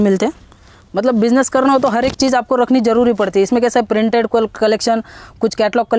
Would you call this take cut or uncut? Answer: uncut